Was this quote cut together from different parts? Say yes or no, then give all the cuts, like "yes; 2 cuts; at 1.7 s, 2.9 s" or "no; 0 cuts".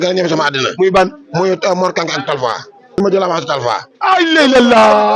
yes; 1 cut; at 3.0 s